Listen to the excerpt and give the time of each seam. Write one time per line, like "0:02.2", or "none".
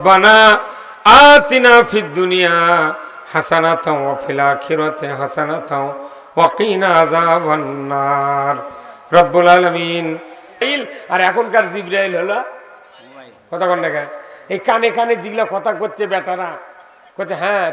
0:10.6